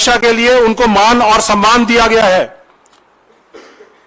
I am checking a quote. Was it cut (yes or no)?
no